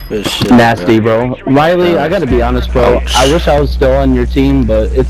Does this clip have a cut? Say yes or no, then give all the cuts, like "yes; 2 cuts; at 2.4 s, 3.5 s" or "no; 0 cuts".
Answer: no; 0 cuts